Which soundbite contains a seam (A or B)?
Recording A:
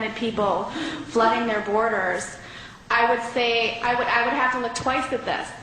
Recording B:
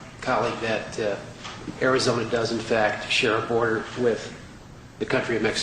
A